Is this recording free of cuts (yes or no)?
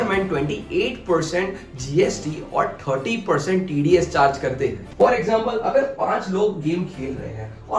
yes